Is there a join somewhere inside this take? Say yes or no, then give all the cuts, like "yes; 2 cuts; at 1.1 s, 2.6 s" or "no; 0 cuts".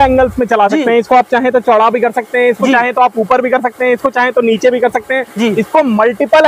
no; 0 cuts